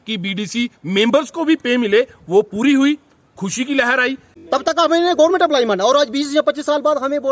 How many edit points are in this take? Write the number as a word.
one